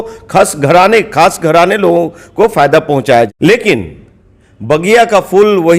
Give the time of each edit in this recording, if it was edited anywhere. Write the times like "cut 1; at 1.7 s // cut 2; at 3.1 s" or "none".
cut 1; at 3.3 s